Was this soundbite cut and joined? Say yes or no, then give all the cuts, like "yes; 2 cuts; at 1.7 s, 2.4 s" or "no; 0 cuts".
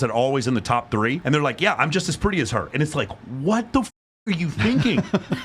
yes; 1 cut; at 1.2 s